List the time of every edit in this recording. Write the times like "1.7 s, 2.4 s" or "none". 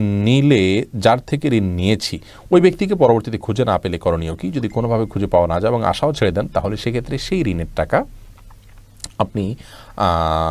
none